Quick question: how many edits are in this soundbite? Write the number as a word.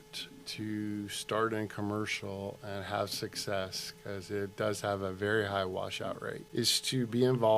one